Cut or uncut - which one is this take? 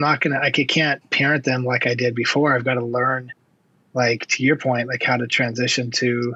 uncut